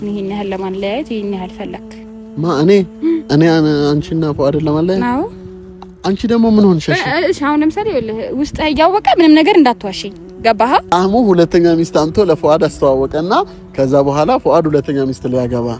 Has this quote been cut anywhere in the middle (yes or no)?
yes